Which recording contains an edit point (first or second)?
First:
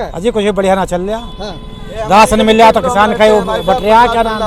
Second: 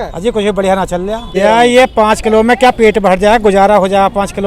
second